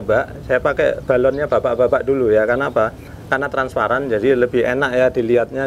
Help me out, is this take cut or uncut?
uncut